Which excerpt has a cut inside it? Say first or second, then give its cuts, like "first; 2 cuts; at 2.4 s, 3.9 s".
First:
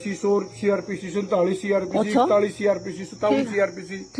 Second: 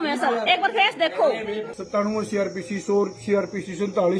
second; 1 cut; at 1.7 s